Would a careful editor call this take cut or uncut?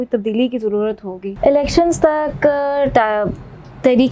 cut